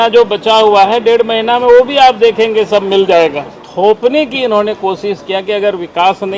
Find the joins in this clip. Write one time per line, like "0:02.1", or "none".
0:03.6